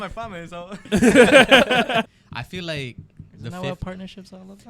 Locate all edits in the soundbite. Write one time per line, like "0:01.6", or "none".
0:02.1